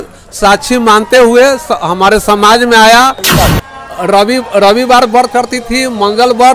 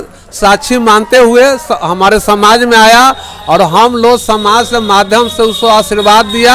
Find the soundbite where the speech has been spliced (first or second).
first